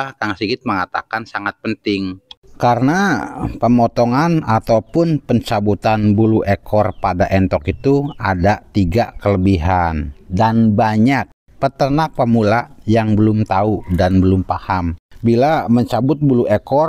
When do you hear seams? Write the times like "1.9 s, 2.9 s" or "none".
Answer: none